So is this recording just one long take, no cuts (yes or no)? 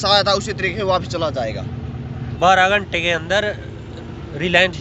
yes